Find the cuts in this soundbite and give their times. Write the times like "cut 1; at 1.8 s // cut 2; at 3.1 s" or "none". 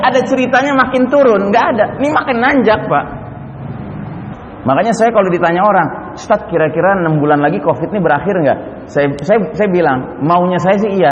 cut 1; at 4.3 s